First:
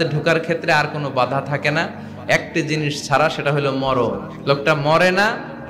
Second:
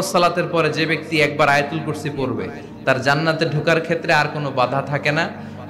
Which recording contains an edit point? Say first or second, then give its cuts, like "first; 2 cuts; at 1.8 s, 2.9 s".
first; 1 cut; at 4.3 s